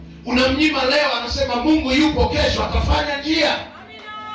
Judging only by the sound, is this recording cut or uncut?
uncut